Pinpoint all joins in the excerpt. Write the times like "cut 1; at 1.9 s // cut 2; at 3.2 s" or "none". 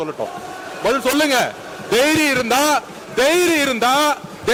none